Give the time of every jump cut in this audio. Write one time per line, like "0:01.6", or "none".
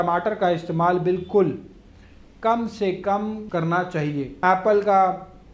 0:04.4